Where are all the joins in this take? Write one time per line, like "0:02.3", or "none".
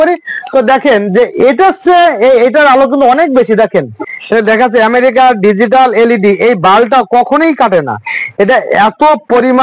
0:04.1